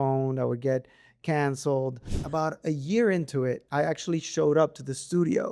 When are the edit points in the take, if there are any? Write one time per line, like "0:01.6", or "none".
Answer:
0:02.1
0:03.6